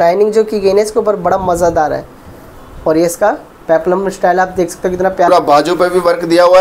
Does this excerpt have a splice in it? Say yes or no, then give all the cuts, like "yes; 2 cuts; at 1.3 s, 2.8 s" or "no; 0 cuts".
yes; 1 cut; at 5.3 s